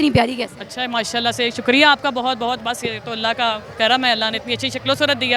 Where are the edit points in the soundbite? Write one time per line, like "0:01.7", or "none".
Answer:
none

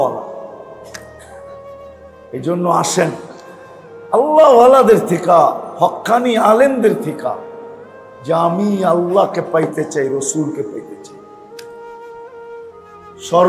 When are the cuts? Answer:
0:10.9
0:12.8

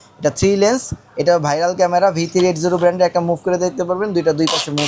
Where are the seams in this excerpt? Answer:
none

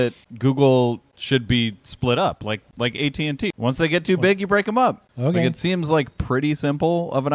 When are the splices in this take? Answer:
0:03.5

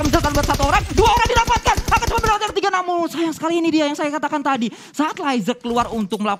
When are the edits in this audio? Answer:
none

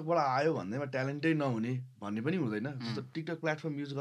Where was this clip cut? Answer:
none

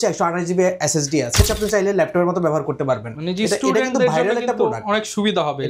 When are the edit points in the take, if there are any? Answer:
0:01.4

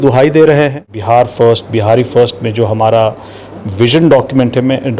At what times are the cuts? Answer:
0:00.9

